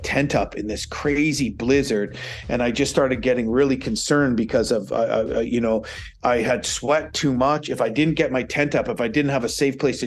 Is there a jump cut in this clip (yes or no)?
no